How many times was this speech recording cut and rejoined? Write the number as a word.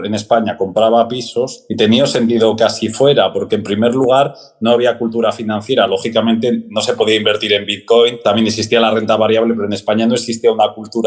two